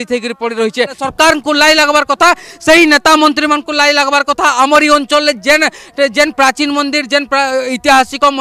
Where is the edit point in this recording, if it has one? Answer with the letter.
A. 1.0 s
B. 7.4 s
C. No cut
A